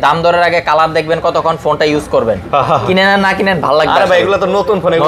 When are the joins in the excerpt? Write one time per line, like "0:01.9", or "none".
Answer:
none